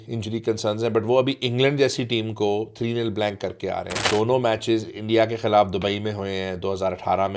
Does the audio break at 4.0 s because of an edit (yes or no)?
yes